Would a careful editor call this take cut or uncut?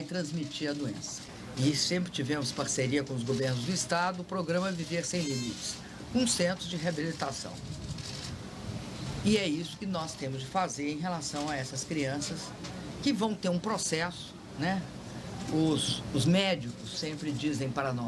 cut